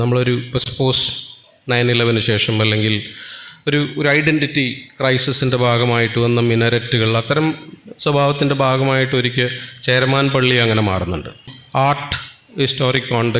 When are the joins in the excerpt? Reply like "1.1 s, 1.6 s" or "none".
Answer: 11.6 s